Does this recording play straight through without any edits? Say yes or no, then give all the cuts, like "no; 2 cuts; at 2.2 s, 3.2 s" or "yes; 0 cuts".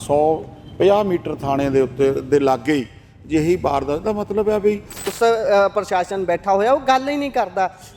no; 1 cut; at 5.1 s